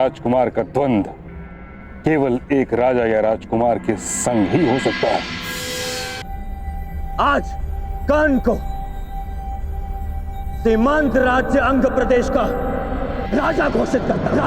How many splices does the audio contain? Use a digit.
1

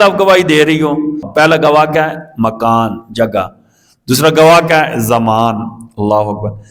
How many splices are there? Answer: 1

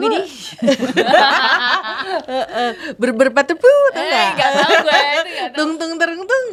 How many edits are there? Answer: 0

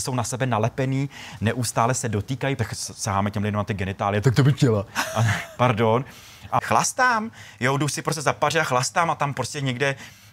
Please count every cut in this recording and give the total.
3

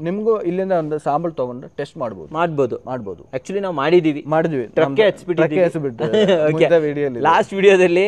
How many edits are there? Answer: 0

